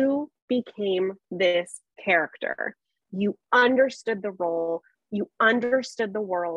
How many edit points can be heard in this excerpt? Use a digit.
0